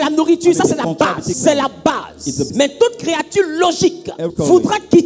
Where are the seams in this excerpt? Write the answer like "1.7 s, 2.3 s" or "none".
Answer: 1.4 s, 2.5 s, 4.3 s